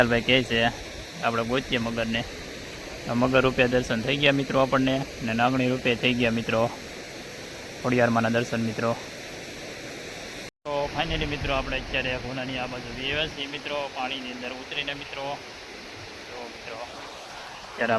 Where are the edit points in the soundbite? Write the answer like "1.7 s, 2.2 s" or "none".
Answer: 10.5 s